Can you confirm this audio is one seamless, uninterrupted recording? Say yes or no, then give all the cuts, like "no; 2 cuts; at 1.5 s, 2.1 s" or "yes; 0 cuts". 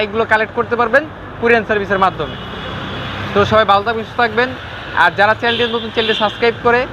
yes; 0 cuts